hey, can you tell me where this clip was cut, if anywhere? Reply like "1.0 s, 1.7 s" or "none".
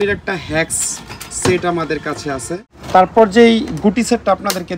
2.7 s